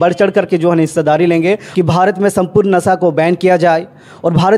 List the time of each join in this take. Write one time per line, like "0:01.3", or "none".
0:01.6